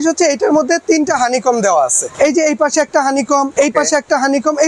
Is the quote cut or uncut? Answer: cut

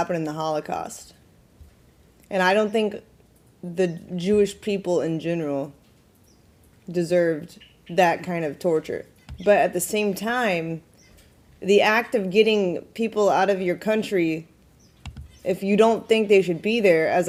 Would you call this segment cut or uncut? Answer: uncut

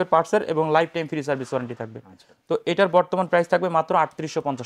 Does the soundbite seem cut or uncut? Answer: uncut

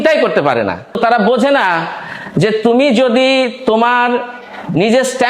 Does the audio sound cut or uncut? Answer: cut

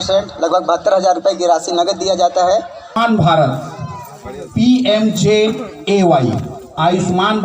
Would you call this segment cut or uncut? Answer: cut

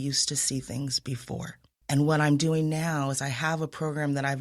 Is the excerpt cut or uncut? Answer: cut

